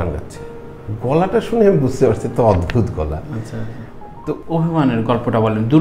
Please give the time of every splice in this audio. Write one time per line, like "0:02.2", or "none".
0:04.4